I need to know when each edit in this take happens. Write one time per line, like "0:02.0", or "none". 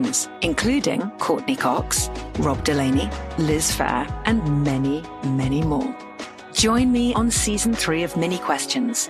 none